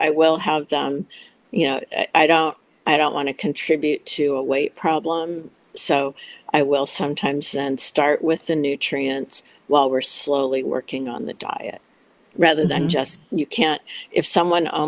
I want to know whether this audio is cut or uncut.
uncut